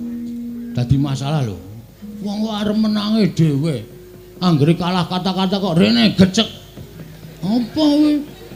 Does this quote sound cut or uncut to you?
uncut